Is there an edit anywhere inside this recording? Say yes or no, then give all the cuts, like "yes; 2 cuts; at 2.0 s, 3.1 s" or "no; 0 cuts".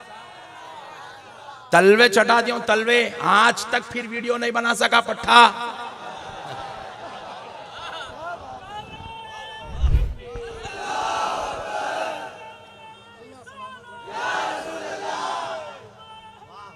no; 0 cuts